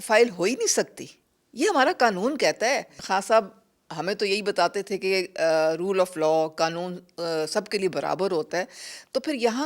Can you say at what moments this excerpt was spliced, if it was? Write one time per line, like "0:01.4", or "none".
0:03.0